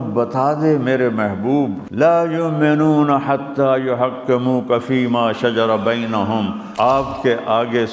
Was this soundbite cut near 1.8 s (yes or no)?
yes